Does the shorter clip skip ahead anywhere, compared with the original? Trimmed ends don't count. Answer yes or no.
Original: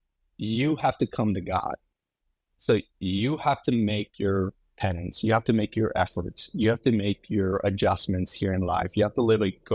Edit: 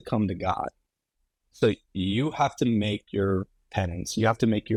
no